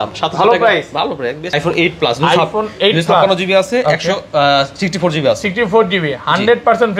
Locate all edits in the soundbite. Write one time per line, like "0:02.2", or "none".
0:01.5

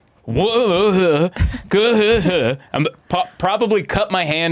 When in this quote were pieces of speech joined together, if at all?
none

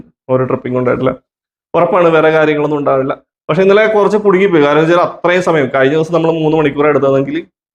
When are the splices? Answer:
none

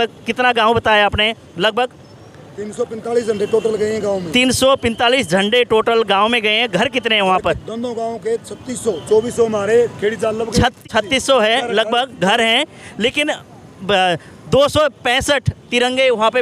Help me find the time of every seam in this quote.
0:10.9

